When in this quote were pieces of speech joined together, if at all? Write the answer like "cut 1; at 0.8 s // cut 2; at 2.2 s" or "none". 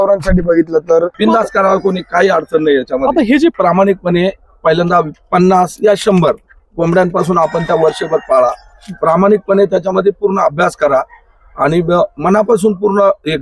cut 1; at 1.1 s // cut 2; at 3.6 s